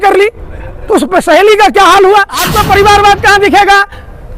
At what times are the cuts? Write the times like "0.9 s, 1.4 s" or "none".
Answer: 2.5 s